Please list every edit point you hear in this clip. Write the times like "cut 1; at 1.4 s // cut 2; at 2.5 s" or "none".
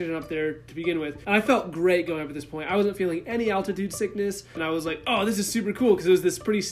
cut 1; at 1.2 s // cut 2; at 4.6 s